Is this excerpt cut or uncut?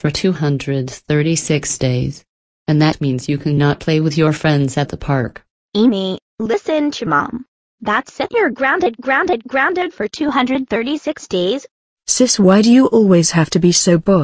uncut